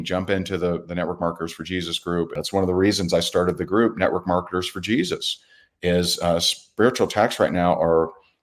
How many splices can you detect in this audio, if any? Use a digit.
1